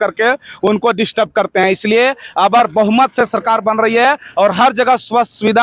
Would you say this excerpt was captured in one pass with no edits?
yes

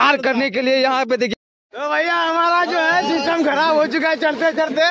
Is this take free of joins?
no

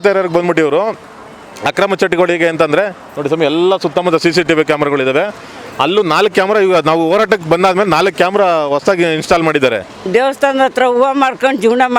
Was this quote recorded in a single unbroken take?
no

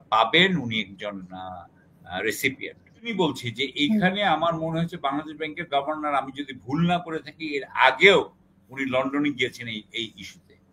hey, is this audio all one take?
no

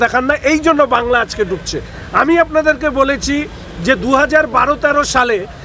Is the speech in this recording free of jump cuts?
yes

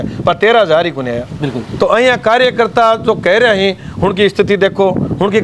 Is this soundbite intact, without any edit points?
yes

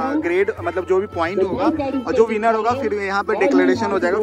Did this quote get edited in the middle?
no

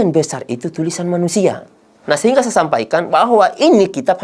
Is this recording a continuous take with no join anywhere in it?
no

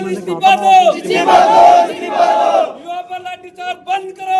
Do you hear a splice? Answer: no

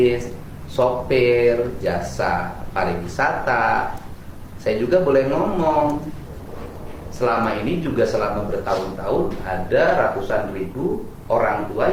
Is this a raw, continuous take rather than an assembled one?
yes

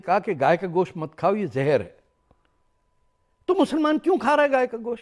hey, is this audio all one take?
yes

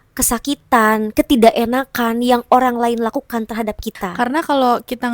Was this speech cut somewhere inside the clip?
yes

